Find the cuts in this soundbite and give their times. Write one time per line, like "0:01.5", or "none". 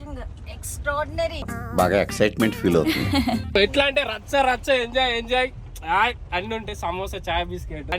0:01.0
0:03.6